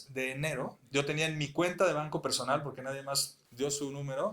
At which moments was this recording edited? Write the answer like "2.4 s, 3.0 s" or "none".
3.4 s